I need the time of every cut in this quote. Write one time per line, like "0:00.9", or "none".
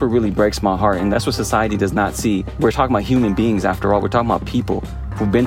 0:01.1
0:02.5